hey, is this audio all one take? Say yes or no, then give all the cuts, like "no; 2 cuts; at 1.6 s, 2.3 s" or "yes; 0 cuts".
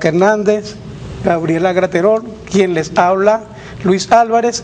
no; 1 cut; at 1.6 s